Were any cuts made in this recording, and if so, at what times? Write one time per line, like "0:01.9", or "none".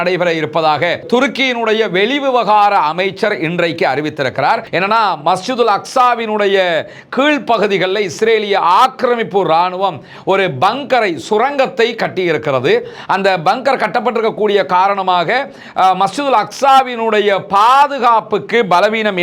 0:04.7